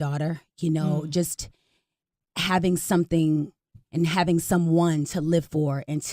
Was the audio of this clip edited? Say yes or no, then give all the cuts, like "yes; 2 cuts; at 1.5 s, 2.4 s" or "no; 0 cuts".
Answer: yes; 1 cut; at 4.1 s